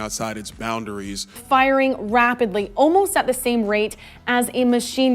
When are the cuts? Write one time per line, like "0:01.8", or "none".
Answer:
0:01.3